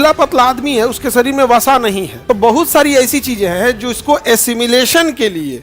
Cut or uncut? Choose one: cut